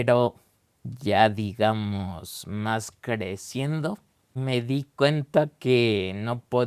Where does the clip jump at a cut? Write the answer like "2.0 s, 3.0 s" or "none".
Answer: 4.3 s